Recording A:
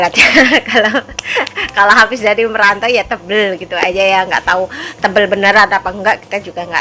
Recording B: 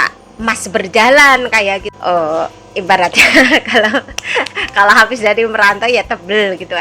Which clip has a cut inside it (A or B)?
B